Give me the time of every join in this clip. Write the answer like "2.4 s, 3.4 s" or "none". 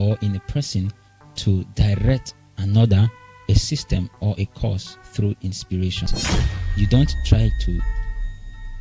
6.2 s